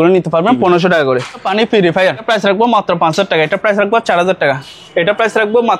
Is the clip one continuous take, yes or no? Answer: no